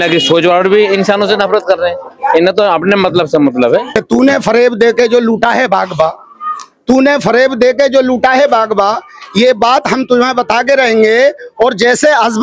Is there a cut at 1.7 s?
no; 1 cut; at 3.9 s

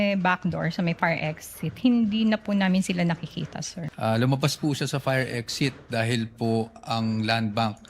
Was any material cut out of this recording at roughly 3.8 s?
yes; 1 cut; at 3.8 s

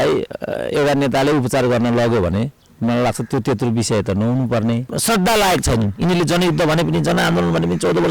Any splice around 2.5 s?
no; 1 cut; at 4.9 s

